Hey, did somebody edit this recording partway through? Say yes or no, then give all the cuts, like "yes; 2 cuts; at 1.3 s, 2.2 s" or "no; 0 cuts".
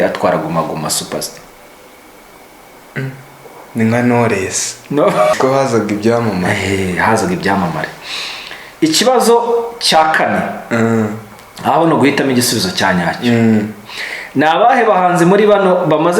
yes; 1 cut; at 5.4 s